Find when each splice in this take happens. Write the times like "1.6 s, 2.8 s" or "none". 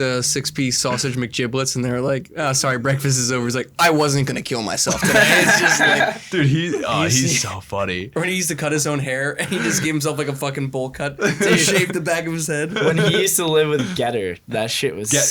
none